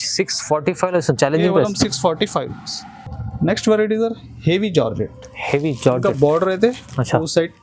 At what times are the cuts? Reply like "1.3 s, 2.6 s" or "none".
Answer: none